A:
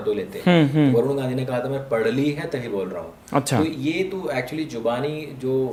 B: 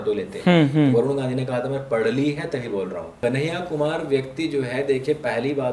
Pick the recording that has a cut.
B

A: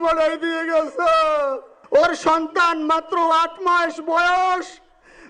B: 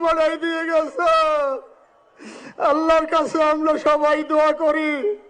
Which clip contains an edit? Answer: A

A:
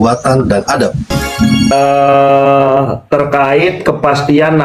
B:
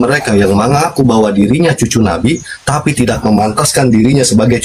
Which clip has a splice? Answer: A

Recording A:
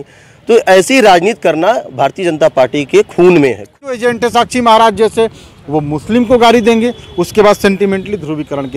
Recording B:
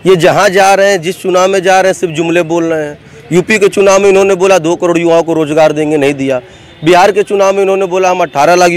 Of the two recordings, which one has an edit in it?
A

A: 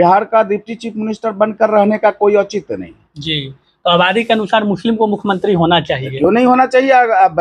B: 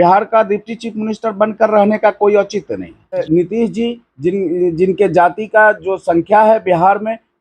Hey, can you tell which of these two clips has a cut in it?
B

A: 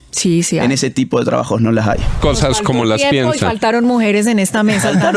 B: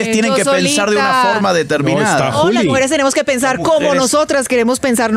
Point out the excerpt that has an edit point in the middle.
A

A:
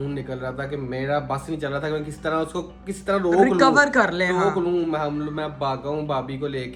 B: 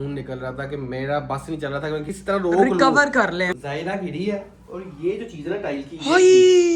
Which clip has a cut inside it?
B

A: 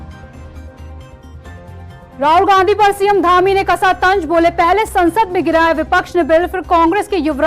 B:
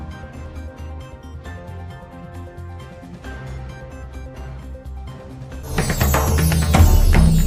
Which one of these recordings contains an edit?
A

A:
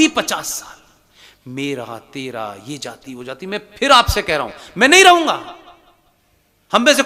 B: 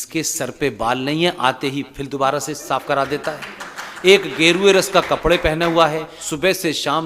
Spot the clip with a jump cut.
B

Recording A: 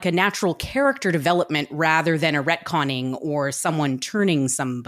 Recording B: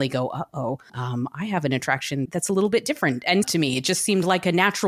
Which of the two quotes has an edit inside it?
B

